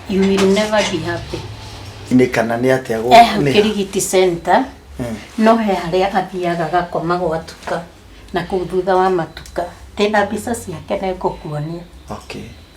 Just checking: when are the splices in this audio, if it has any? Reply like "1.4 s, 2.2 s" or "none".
2.1 s